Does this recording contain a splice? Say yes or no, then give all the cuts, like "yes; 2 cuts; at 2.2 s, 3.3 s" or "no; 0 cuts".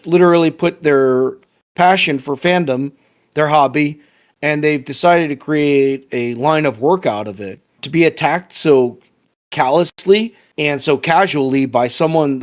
no; 0 cuts